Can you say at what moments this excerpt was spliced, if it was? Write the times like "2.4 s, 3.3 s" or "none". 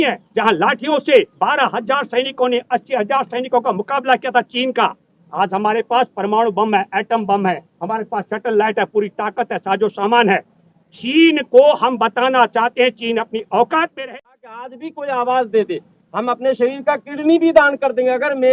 13.9 s